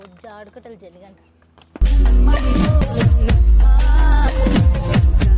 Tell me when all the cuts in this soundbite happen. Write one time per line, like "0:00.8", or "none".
none